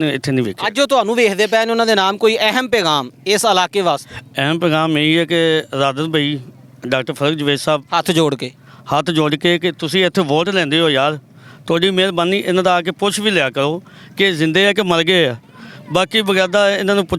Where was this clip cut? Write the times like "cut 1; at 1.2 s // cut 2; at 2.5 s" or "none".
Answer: none